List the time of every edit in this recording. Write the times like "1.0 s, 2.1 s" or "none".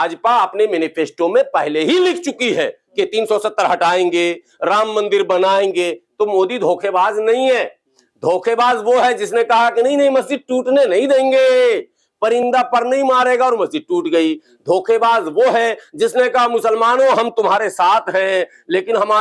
none